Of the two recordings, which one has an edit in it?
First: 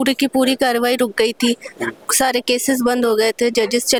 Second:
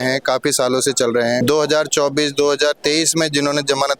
second; 1 cut; at 1.4 s

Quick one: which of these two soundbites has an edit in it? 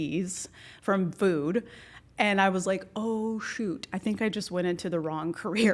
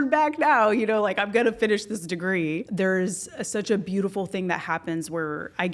second; 1 cut; at 2.7 s

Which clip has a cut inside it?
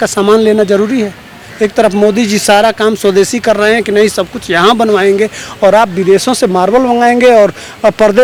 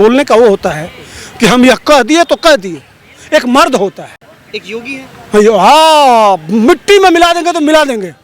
second; 1 cut; at 1.8 s

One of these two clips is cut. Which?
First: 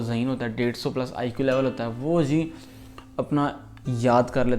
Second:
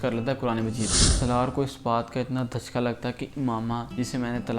second; 1 cut; at 1.0 s

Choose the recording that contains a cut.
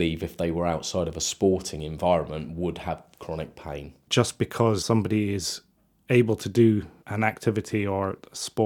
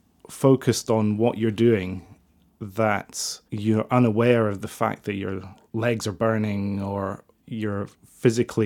first; 1 cut; at 4.0 s

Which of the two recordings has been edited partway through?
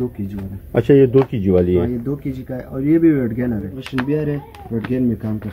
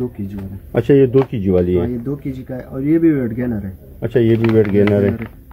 first; 1 cut; at 3.8 s

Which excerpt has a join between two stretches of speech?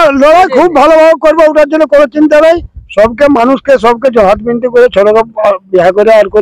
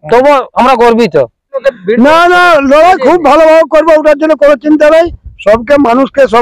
second; 1 cut; at 1.5 s

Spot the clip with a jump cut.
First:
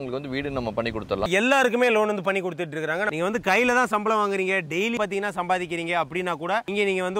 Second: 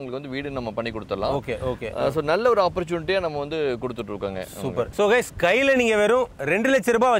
first; 3 cuts; at 1.3 s, 3.1 s, 5.0 s

